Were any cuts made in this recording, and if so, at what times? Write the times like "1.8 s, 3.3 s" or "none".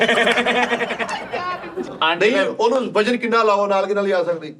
1.9 s